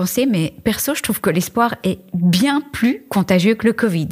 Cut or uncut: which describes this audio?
uncut